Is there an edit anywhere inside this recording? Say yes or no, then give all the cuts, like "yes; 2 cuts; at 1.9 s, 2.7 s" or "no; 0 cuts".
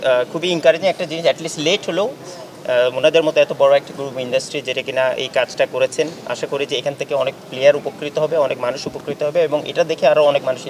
no; 0 cuts